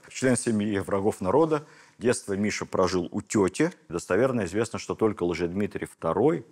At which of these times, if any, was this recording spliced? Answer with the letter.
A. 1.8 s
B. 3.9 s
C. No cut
B